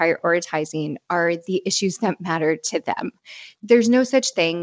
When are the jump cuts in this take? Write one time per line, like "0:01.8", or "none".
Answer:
0:03.5